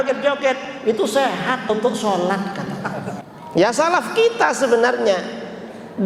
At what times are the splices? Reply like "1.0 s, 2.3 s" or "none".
3.2 s

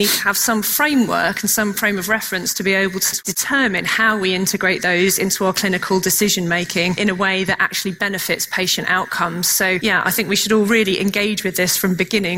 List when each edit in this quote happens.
3.0 s, 7.0 s, 9.8 s

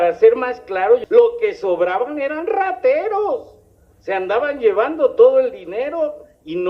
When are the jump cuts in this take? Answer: 1.0 s

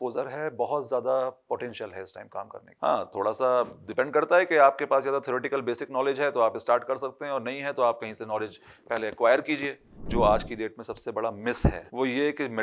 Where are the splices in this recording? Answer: 10.0 s

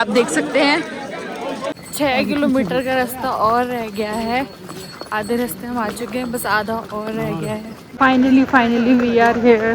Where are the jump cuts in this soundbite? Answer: 1.6 s, 7.8 s

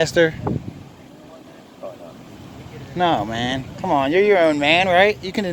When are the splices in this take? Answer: none

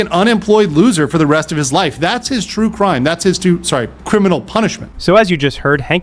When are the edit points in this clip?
none

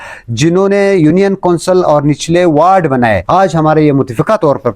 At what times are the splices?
3.2 s

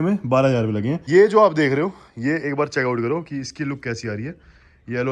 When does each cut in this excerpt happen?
1.0 s

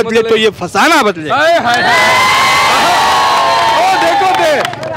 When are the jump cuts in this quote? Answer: none

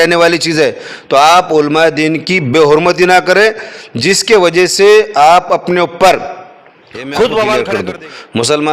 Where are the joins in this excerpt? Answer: 7.6 s

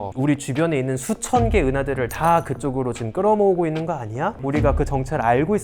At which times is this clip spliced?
4.4 s

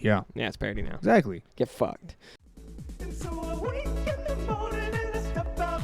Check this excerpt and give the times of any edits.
2.4 s

